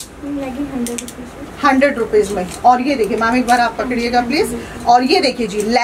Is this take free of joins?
yes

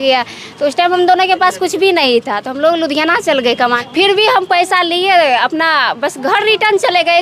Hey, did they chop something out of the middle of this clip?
yes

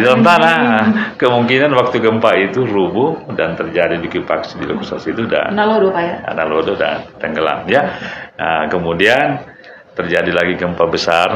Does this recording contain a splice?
no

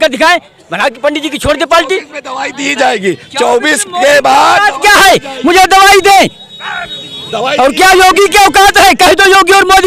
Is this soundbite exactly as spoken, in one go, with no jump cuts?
yes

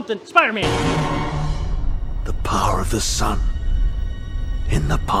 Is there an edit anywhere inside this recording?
no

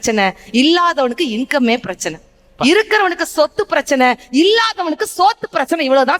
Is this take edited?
no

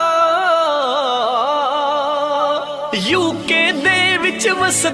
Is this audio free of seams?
yes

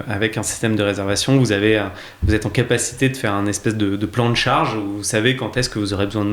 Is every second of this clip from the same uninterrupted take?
yes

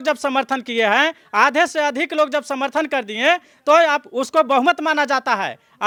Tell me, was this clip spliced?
no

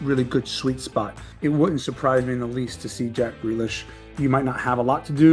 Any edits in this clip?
yes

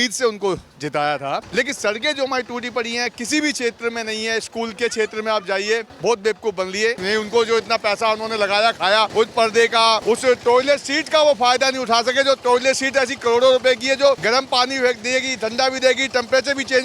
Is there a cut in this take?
yes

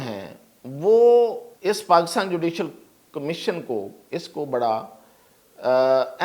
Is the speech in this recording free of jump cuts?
no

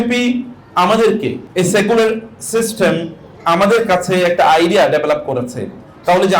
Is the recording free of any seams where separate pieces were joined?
no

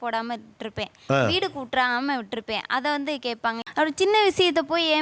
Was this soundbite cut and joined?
yes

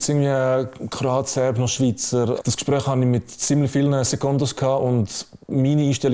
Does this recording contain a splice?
yes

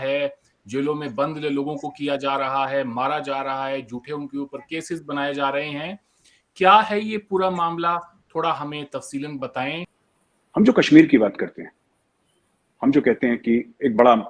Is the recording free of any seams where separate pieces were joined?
no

